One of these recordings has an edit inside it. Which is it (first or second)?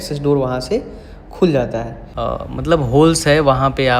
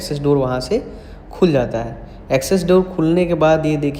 first